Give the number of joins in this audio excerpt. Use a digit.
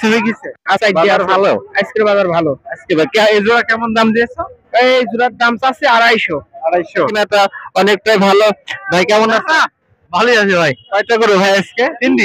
1